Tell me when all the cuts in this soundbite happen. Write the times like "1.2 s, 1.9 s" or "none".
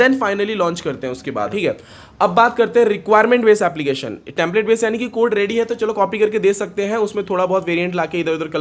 1.5 s